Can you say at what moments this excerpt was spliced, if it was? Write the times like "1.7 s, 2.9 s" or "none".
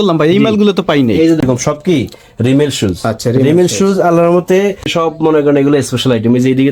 1.4 s, 4.9 s